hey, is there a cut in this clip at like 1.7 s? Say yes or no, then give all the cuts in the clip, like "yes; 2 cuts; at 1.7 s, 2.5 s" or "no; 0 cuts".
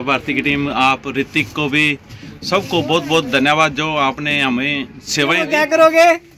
no; 1 cut; at 5.4 s